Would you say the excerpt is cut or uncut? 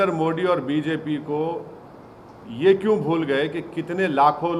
uncut